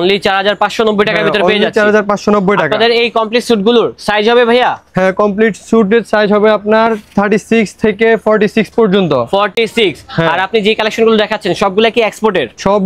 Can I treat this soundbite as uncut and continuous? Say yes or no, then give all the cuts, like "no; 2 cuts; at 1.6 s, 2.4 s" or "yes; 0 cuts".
yes; 0 cuts